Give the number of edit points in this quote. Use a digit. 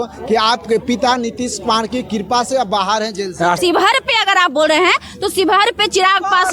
1